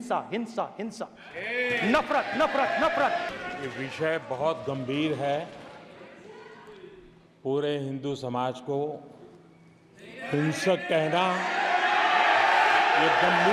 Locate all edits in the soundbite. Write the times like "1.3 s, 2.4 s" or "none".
3.3 s